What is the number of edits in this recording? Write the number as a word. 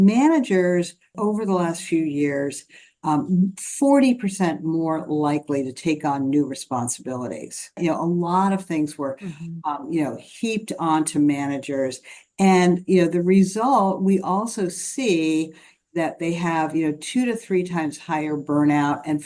two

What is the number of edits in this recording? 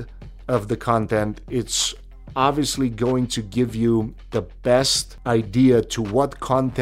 one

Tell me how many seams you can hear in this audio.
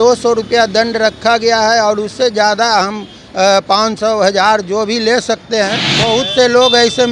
one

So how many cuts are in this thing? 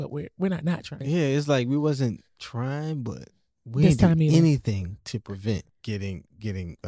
two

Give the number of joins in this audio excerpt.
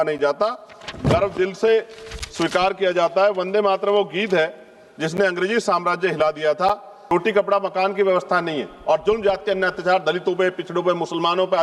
one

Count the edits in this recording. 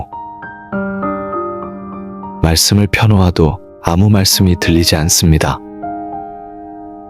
one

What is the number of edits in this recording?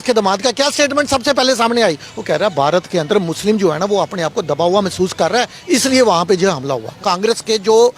one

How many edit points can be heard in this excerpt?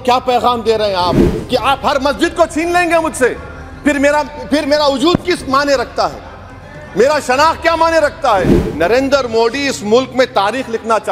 two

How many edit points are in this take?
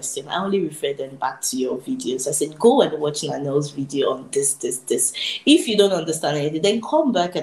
zero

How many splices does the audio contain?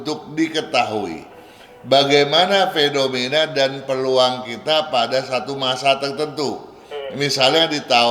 zero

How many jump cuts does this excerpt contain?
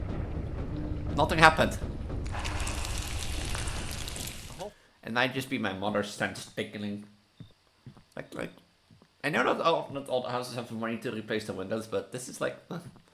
one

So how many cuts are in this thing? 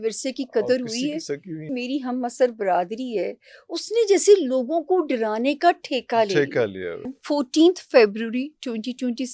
two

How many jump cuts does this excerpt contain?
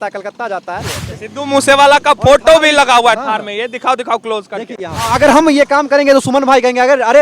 two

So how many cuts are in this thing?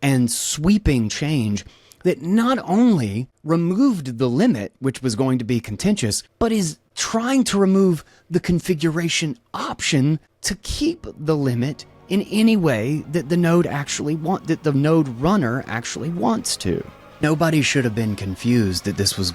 one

